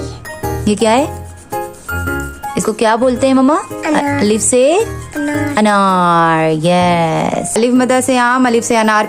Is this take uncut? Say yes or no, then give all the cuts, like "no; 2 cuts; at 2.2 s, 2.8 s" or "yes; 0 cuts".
no; 1 cut; at 7.5 s